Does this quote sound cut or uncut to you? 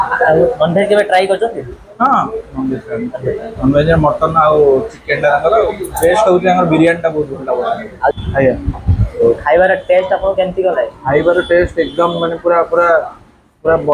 cut